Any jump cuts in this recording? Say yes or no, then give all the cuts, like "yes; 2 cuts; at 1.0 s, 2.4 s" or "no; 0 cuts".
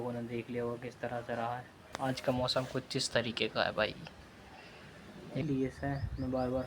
yes; 2 cuts; at 1.8 s, 5.4 s